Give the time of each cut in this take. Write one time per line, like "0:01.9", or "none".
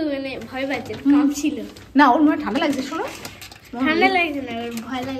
none